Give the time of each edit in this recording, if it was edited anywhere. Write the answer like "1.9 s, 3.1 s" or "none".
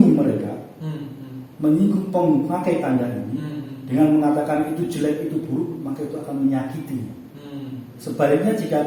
none

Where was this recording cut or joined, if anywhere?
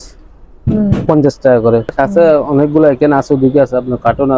1.9 s

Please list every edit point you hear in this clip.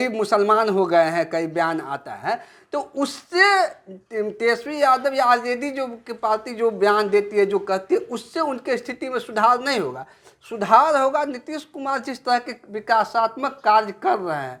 none

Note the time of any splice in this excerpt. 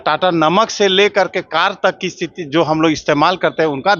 none

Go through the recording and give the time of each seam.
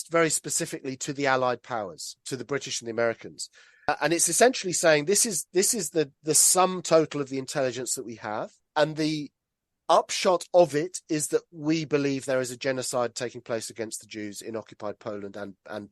3.9 s

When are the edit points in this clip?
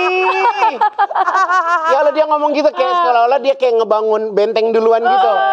none

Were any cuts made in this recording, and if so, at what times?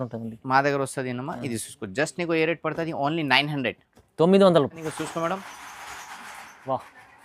4.8 s

